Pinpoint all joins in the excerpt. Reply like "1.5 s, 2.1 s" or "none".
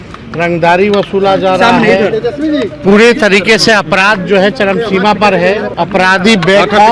5.7 s